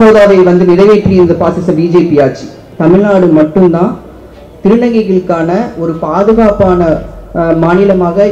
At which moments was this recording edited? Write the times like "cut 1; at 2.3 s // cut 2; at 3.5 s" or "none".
cut 1; at 2.7 s